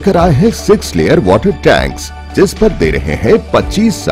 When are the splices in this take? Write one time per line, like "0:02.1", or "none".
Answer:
none